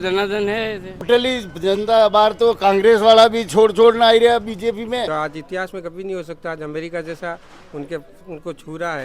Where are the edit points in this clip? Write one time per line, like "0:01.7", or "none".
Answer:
0:01.0
0:05.1

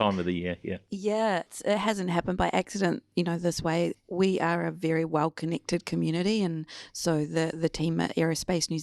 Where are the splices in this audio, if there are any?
0:01.5
0:03.9

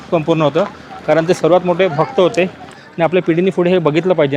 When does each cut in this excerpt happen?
0:02.5

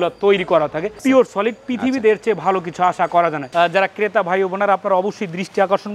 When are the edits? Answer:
0:01.0
0:03.5

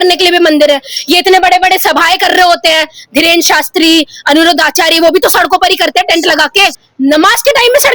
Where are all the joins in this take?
0:06.8

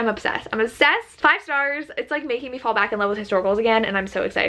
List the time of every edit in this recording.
none

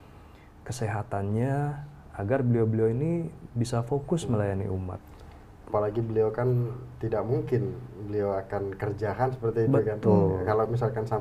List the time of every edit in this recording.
none

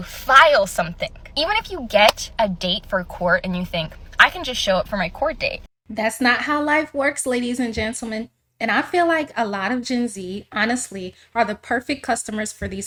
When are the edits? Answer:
none

